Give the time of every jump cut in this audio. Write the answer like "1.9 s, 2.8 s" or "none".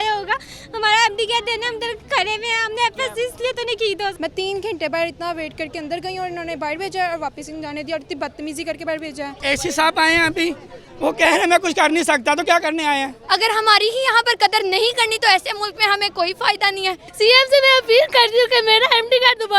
4.2 s, 9.3 s, 13.2 s, 17.0 s